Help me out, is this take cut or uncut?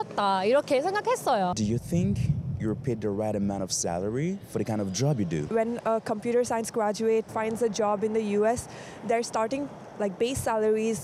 cut